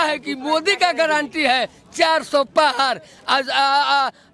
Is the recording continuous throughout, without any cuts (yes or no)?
yes